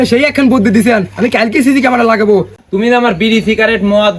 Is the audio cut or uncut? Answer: cut